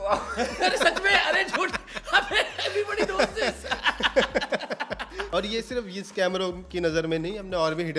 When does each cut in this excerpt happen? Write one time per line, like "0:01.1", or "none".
0:05.3